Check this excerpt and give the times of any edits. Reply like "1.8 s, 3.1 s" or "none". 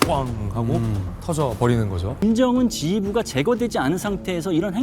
2.2 s